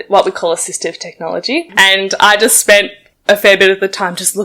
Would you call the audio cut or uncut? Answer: cut